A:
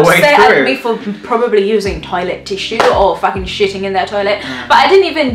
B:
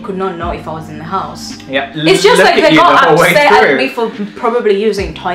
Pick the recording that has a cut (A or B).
B